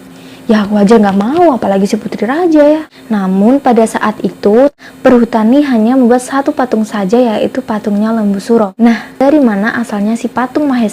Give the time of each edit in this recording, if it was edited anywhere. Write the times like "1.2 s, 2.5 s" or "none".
2.9 s, 4.8 s, 9.2 s